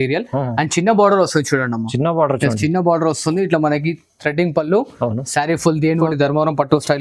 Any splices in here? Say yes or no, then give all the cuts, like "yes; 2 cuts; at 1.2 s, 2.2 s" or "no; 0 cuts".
yes; 1 cut; at 5.9 s